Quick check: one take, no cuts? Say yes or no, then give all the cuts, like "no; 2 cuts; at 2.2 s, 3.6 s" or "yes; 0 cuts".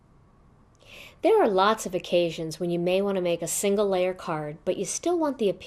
yes; 0 cuts